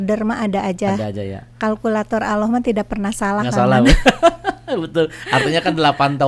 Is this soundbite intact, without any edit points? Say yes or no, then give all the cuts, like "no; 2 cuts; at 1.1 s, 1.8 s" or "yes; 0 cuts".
yes; 0 cuts